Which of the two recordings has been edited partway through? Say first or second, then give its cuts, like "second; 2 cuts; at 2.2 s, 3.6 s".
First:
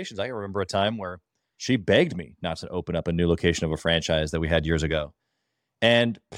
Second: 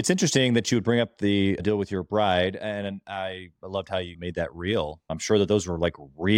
second; 2 cuts; at 4.1 s, 5.1 s